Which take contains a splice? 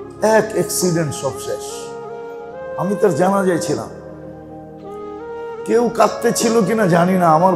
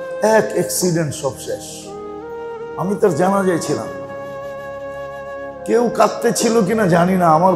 first; 2 cuts; at 1.6 s, 2.8 s

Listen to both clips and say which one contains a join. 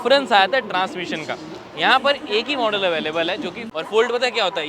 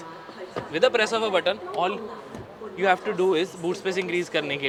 first; 1 cut; at 3.6 s

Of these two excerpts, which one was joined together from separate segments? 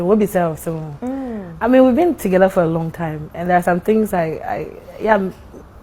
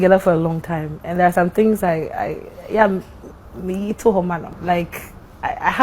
second; 1 cut; at 4.5 s

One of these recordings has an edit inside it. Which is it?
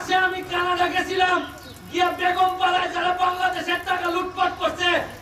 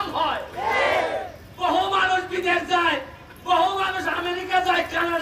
second; 1 cut; at 1.4 s

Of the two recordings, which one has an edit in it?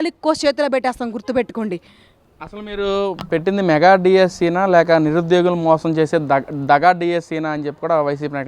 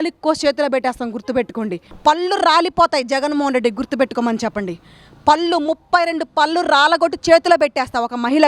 second; 1 cut; at 1.8 s

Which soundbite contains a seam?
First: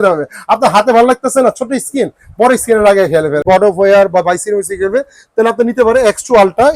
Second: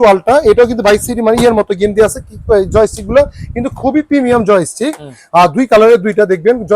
first; 1 cut; at 3.4 s

